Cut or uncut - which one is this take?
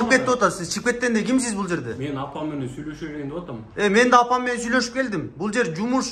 uncut